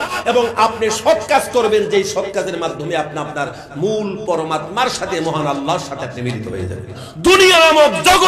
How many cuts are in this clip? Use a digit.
1